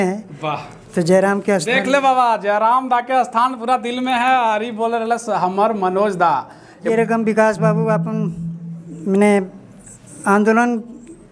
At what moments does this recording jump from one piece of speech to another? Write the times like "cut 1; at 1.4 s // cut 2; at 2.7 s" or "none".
cut 1; at 6.9 s